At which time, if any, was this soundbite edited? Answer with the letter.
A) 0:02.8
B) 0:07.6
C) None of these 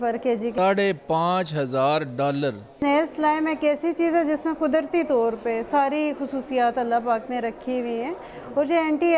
A